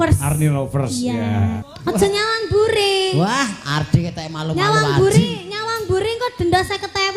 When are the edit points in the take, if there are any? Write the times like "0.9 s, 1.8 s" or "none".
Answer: 1.4 s